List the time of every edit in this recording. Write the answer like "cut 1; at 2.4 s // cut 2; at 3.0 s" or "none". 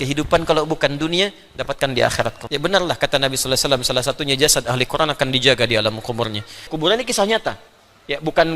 cut 1; at 2.4 s // cut 2; at 6.7 s